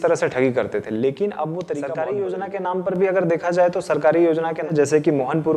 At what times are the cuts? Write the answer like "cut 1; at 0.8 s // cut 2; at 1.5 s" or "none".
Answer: cut 1; at 1.9 s // cut 2; at 4.6 s